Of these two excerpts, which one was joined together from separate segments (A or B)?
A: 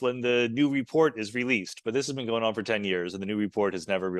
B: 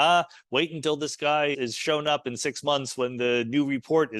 B